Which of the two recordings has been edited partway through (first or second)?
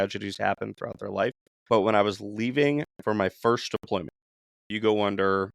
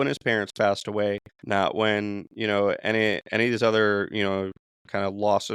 first